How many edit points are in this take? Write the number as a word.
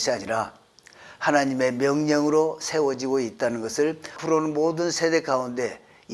one